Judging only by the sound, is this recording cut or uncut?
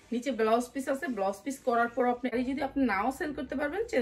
cut